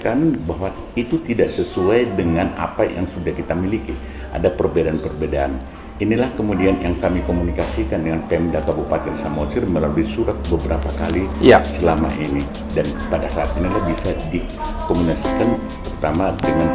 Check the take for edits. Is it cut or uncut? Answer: uncut